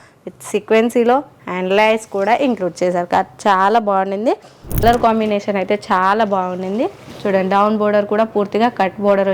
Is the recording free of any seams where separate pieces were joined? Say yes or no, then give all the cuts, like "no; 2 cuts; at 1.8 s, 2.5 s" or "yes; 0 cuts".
no; 1 cut; at 4.8 s